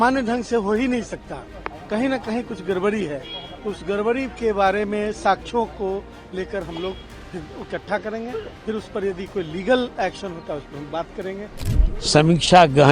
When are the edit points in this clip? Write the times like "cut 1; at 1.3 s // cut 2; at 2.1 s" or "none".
cut 1; at 11.6 s